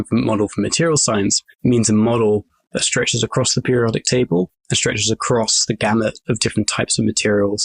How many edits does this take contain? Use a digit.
2